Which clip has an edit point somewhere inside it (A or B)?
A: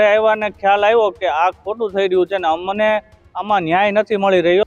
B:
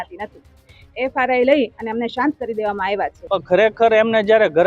B